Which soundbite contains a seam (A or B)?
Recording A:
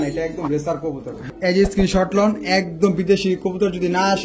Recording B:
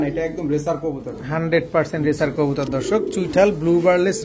A